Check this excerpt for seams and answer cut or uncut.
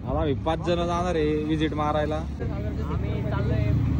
cut